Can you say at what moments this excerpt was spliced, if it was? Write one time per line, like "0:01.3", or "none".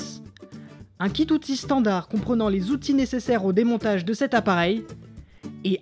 none

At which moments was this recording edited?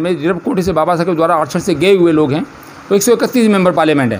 none

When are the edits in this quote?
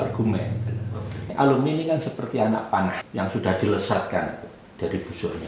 0:01.2
0:03.0

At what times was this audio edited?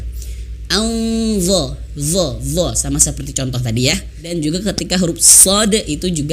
0:04.3

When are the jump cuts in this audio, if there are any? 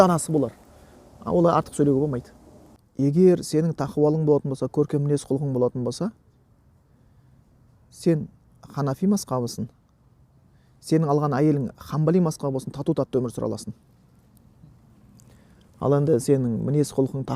0:02.8

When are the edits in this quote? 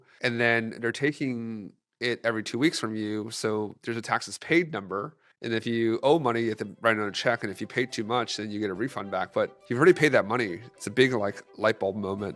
none

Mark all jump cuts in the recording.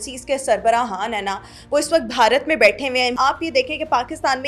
0:03.1

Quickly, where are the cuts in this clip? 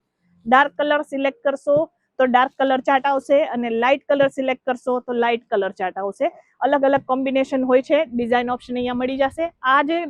none

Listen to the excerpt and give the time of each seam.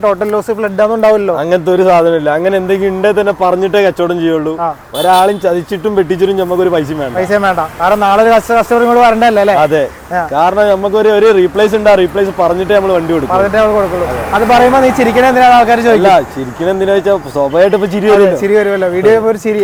none

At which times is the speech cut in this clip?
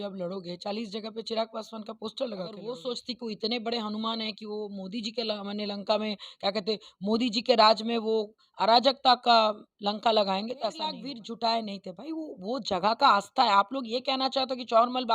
0:02.8
0:11.1

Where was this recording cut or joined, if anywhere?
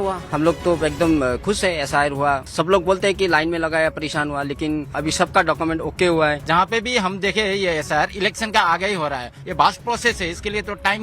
0:02.5
0:04.9
0:06.4

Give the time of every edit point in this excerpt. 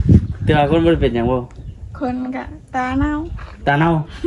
none

